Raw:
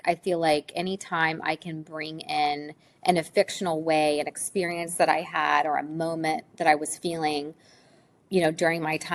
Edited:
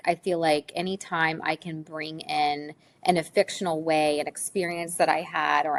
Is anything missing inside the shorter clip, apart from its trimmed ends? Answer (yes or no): no